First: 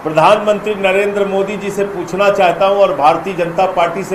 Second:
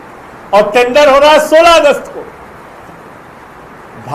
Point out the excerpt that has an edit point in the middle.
second; 1 cut; at 3.2 s

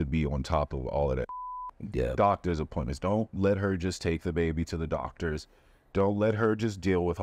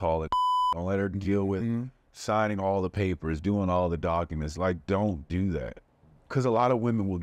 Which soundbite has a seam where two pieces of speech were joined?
second; 1 cut; at 5.8 s

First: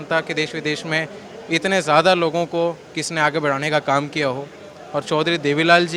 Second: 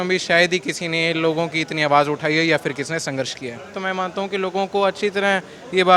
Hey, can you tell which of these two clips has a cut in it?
second; 1 cut; at 3.7 s

